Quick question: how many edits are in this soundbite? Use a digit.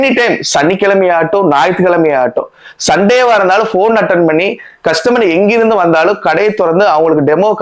0